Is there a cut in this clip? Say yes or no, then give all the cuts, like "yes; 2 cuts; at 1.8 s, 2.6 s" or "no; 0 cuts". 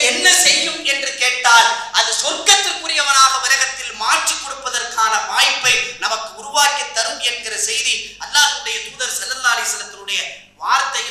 no; 0 cuts